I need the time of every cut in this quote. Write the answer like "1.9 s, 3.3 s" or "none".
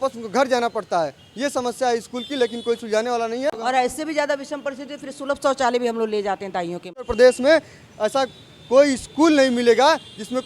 3.5 s, 7.1 s